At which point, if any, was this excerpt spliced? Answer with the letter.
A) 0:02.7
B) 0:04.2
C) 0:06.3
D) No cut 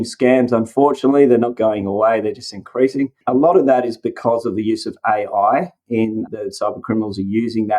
C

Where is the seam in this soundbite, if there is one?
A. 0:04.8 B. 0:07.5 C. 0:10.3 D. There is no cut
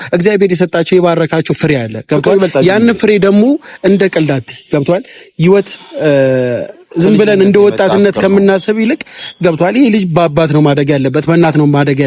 D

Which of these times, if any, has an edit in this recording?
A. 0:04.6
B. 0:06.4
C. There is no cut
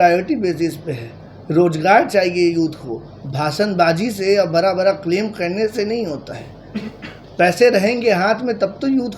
C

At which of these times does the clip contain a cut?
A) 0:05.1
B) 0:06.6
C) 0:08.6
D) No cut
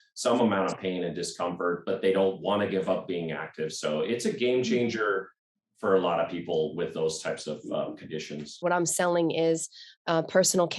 C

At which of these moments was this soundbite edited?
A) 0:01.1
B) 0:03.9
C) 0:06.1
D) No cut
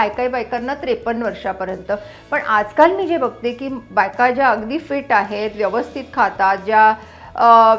D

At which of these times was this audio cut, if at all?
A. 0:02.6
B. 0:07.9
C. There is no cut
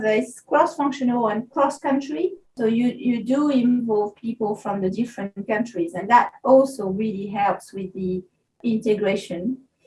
A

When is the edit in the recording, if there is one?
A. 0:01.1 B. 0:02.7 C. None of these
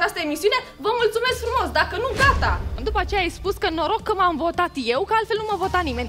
B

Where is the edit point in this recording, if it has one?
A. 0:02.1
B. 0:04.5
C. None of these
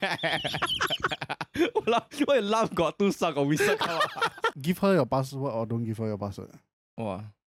B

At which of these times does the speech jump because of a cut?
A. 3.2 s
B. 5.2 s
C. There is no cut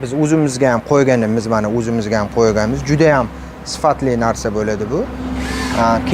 C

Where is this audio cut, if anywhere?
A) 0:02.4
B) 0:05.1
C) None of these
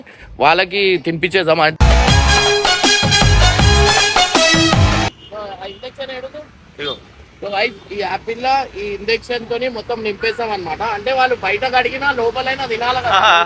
B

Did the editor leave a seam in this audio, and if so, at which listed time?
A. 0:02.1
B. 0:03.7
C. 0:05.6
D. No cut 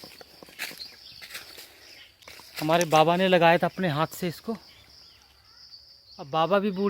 A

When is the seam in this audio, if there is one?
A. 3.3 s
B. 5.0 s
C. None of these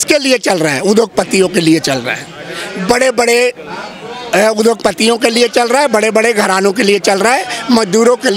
C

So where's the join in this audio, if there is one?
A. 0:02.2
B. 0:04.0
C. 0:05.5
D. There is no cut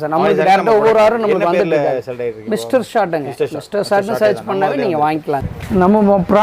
C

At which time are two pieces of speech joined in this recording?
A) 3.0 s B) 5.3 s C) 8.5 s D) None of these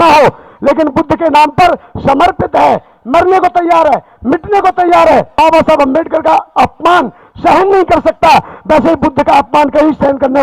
B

